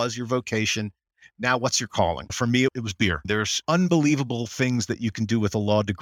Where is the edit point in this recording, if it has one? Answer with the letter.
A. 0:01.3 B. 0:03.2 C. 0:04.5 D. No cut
B